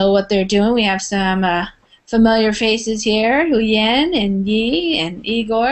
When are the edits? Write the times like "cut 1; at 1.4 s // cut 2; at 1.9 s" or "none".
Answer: none